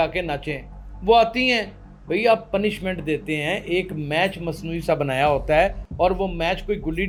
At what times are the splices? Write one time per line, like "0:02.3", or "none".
none